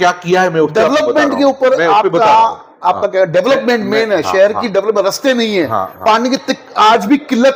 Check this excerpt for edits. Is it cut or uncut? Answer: uncut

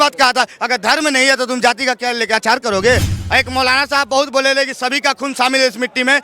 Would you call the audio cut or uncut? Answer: cut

